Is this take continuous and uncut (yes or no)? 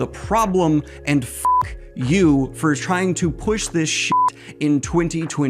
yes